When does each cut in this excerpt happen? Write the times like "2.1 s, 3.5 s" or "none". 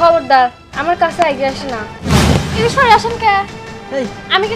1.9 s